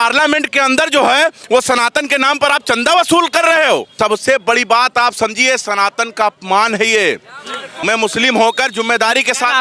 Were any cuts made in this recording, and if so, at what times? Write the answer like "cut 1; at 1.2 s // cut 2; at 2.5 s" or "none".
cut 1; at 3.9 s // cut 2; at 7.7 s